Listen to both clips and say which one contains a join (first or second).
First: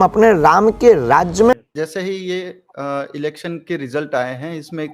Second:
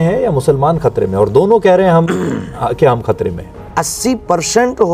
first